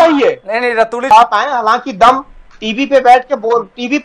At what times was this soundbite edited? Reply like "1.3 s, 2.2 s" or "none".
1.1 s